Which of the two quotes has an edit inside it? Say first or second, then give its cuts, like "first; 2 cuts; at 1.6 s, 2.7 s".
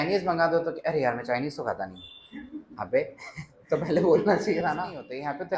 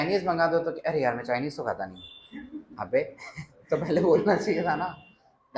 first; 1 cut; at 4.6 s